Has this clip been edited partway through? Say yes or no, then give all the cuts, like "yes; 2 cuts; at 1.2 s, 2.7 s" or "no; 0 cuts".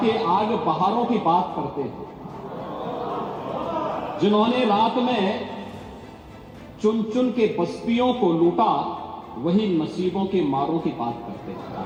no; 0 cuts